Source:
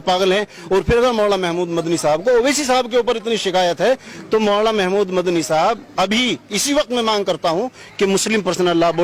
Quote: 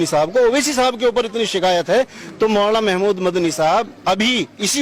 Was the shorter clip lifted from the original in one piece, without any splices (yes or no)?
yes